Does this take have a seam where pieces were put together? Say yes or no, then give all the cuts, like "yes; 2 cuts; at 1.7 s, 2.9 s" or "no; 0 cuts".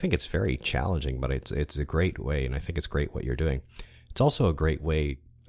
yes; 1 cut; at 3.6 s